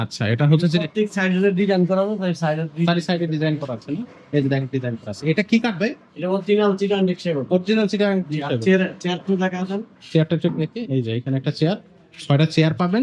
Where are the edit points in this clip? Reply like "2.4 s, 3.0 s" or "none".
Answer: none